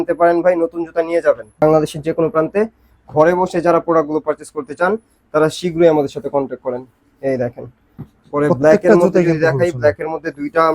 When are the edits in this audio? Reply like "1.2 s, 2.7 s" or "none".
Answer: 1.6 s

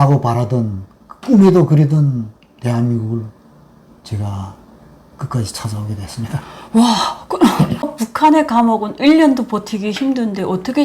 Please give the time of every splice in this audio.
7.8 s

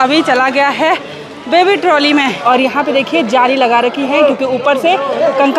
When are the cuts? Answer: 2.4 s

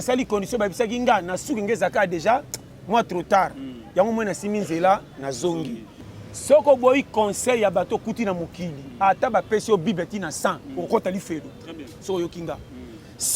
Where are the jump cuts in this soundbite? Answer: 6.0 s

